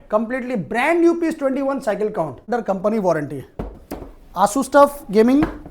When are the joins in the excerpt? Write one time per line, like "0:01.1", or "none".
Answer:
0:02.4